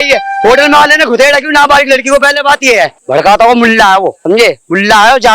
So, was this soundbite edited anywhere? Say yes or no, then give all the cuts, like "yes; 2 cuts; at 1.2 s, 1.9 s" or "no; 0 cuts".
yes; 2 cuts; at 3.0 s, 4.2 s